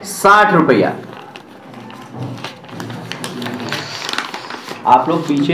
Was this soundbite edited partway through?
no; 0 cuts

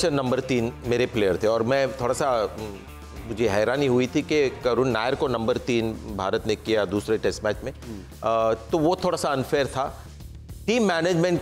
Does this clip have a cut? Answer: no; 0 cuts

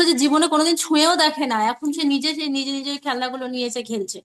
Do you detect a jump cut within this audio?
no; 0 cuts

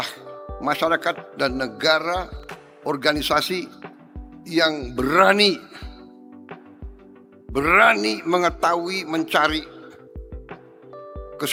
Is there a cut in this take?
no; 0 cuts

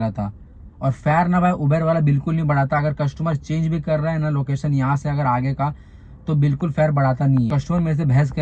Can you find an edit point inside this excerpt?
yes; 1 cut; at 7.5 s

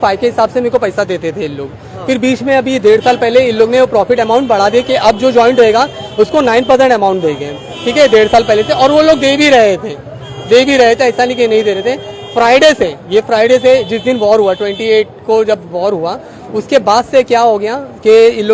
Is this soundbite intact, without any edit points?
yes; 0 cuts

